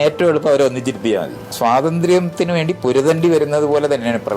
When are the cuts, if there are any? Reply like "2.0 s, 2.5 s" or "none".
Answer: 1.5 s